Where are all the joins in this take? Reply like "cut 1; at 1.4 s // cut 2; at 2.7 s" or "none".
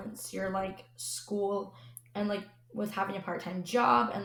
none